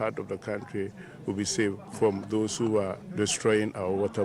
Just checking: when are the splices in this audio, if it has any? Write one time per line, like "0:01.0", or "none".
0:01.9
0:03.0